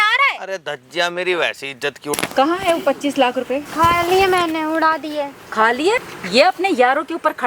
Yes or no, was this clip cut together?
yes